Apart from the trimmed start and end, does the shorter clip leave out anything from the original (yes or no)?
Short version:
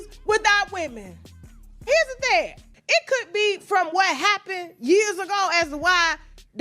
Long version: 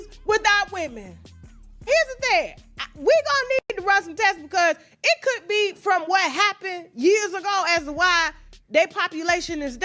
yes